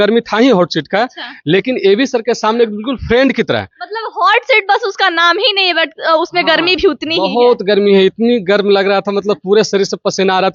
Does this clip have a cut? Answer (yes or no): no